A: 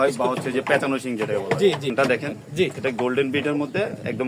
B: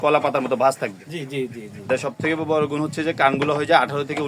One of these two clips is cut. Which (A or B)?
A